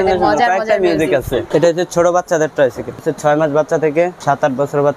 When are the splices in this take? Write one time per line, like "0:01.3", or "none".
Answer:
0:01.4
0:03.1
0:04.2